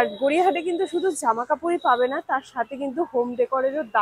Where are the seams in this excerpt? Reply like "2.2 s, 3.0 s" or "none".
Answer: none